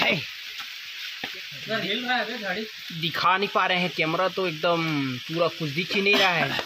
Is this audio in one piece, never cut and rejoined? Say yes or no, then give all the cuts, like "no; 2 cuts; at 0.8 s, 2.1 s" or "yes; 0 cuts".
no; 1 cut; at 1.3 s